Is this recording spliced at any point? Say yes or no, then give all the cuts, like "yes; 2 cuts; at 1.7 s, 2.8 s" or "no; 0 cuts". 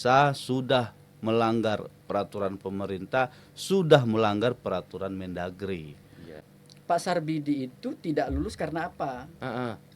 yes; 1 cut; at 6.4 s